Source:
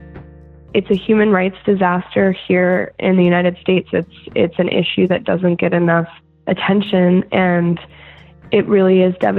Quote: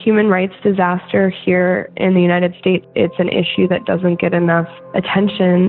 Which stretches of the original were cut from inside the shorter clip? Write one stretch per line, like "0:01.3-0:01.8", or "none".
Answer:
0:03.9-0:04.2
0:06.2-0:06.3